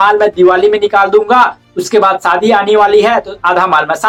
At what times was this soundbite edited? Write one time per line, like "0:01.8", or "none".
none